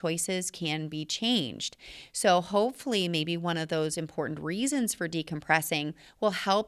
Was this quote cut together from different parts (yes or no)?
no